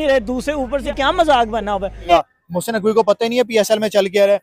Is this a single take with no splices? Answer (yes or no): no